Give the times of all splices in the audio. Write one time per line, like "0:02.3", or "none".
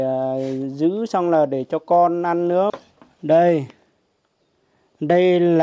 0:02.7